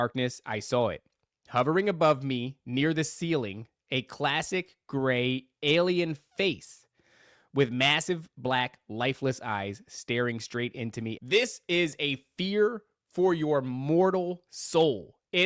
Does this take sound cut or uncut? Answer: cut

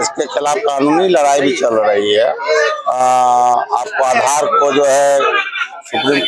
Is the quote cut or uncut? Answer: uncut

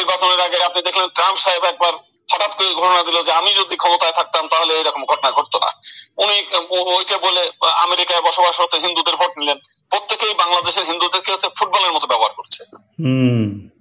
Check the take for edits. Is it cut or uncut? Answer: uncut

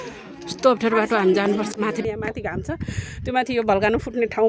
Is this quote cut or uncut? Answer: cut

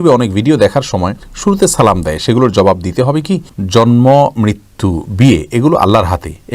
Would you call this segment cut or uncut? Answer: cut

